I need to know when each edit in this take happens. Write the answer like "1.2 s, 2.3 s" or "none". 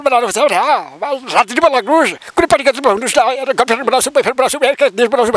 none